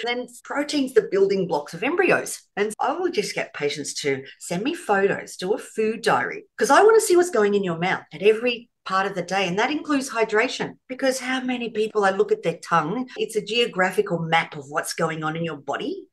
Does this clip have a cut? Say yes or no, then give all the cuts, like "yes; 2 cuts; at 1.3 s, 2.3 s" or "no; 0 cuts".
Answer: yes; 1 cut; at 13.2 s